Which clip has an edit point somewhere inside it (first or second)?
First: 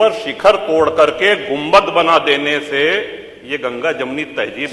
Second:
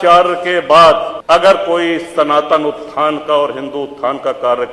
second